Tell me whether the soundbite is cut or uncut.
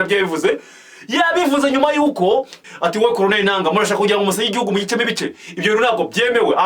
cut